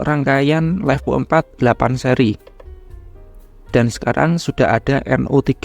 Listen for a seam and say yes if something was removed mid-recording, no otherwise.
no